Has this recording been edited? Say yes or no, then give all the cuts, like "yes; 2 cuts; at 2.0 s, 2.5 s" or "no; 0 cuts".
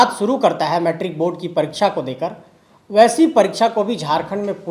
no; 0 cuts